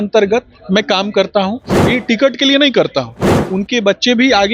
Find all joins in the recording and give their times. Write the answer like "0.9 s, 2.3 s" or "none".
1.8 s, 3.3 s